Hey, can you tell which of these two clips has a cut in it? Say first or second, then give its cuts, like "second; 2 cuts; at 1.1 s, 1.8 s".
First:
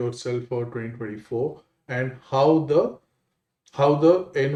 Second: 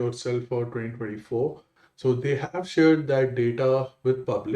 second; 1 cut; at 1.7 s